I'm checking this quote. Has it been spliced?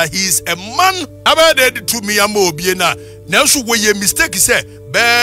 yes; 1 cut; at 1.1 s

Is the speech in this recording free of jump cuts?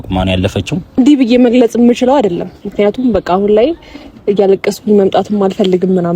no; 1 cut; at 1.0 s

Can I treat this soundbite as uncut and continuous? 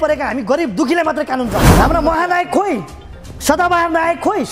no; 1 cut; at 1.7 s

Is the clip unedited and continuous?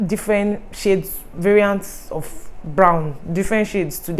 yes; 0 cuts

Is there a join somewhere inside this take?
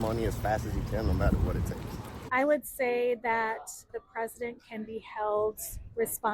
yes; 2 cuts; at 2.3 s, 3.9 s

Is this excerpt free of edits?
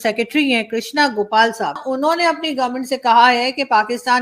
no; 1 cut; at 1.8 s

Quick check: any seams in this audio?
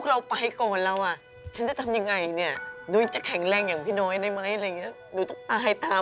yes; 1 cut; at 2.7 s

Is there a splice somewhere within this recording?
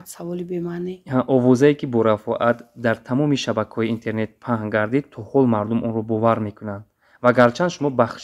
no; 0 cuts

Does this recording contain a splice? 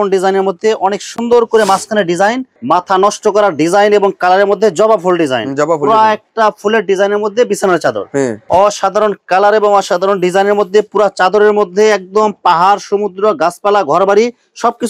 yes; 2 cuts; at 2.5 s, 8.4 s

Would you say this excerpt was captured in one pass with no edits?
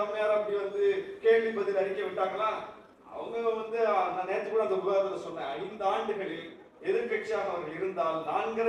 yes; 0 cuts

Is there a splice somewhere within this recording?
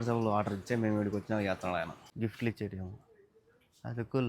yes; 1 cut; at 2.0 s

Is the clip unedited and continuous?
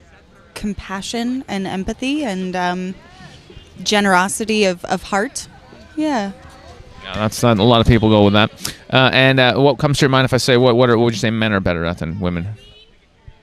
yes; 0 cuts

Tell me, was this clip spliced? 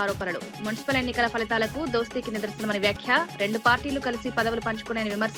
no; 0 cuts

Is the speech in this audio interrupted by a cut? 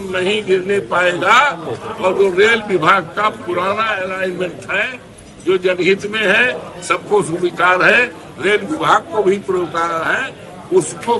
no; 0 cuts

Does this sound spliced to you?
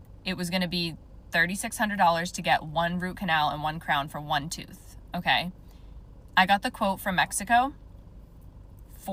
no; 0 cuts

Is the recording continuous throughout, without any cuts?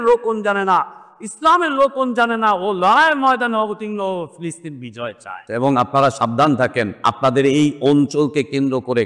no; 2 cuts; at 5.4 s, 6.9 s

